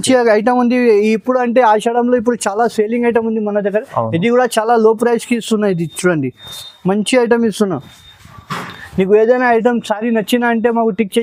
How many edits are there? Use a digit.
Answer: 0